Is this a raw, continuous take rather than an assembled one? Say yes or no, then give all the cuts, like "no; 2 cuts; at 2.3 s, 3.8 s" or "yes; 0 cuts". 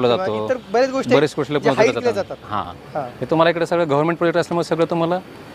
yes; 0 cuts